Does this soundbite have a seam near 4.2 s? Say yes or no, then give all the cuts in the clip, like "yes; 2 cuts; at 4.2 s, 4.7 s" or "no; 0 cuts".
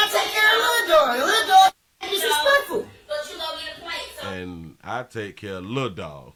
no; 0 cuts